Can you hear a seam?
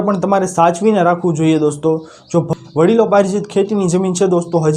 yes; 1 cut; at 2.5 s

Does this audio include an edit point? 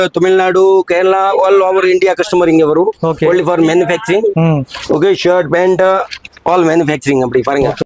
no; 0 cuts

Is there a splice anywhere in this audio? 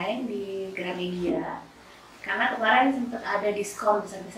no; 0 cuts

